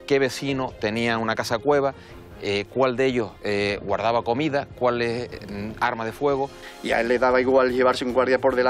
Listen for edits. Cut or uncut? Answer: cut